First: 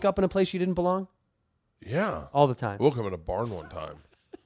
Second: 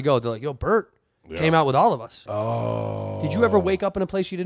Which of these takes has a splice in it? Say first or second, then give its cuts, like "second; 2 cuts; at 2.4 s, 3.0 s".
second; 1 cut; at 2.2 s